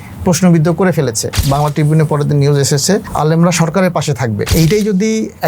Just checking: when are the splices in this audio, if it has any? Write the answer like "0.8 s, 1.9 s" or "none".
1.4 s, 3.1 s, 4.5 s